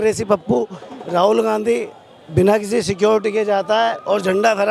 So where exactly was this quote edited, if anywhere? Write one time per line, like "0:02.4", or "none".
none

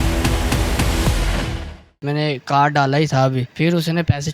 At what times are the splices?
0:02.0
0:03.5

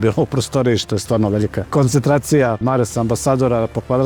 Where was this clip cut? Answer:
0:01.6
0:02.6

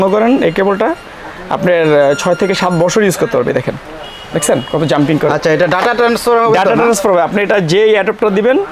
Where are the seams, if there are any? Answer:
none

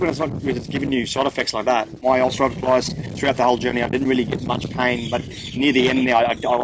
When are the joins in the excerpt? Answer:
0:02.0

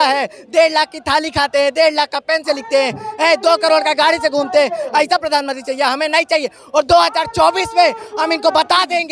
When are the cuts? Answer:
none

